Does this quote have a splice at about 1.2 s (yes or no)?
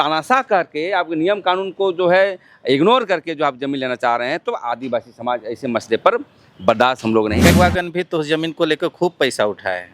no